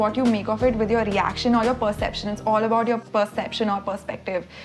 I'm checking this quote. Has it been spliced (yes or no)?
yes